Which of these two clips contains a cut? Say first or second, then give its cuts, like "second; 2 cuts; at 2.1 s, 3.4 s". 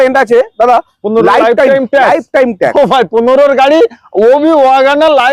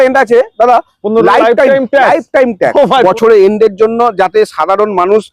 second; 1 cut; at 3.0 s